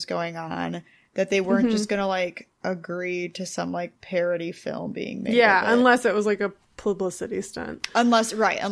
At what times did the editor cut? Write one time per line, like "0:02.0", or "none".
0:02.5
0:04.0